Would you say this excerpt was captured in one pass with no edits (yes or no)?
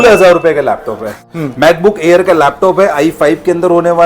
no